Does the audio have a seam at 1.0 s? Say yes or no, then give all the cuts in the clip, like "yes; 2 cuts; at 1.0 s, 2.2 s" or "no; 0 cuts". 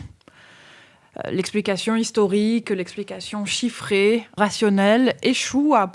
no; 1 cut; at 4.4 s